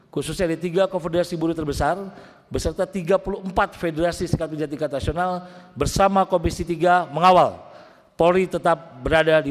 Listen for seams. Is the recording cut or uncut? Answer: uncut